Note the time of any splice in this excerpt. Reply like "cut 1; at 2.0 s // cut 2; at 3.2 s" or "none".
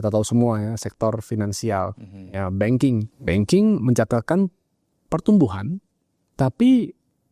cut 1; at 3.1 s